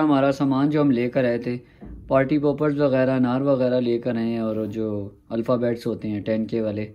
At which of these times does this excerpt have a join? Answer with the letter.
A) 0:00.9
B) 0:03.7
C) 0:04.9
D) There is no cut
D